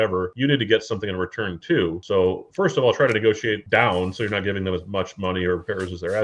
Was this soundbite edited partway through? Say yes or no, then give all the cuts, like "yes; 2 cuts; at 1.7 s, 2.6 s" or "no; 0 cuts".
no; 0 cuts